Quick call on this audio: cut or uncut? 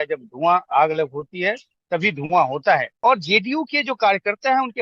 cut